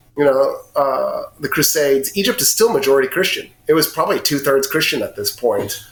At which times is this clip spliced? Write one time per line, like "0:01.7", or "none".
none